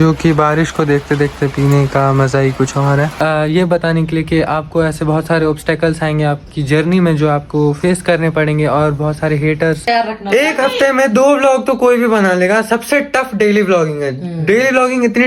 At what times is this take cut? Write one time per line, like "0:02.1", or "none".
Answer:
0:03.1
0:09.8